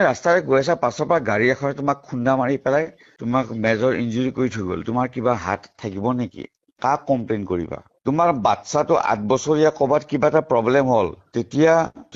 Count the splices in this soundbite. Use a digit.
2